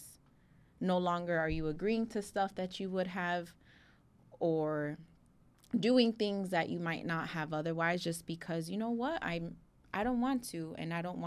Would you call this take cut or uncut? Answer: uncut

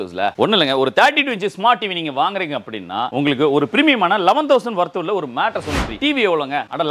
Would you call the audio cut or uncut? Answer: cut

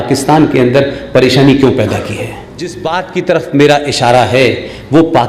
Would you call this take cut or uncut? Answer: cut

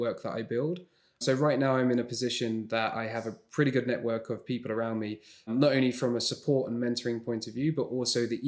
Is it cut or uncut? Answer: cut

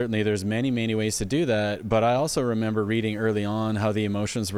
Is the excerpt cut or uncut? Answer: uncut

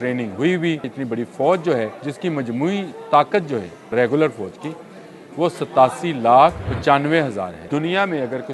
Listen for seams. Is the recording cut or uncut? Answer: cut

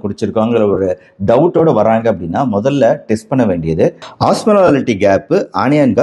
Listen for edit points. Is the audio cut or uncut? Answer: uncut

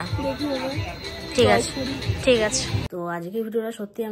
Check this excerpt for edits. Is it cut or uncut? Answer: cut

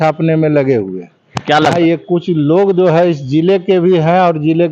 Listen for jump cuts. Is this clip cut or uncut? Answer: cut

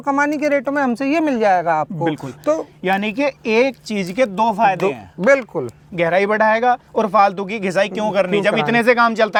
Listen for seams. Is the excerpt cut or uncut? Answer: uncut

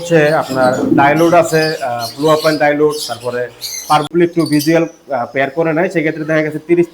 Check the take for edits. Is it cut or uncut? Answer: cut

